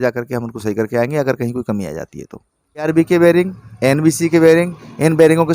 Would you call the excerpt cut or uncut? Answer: cut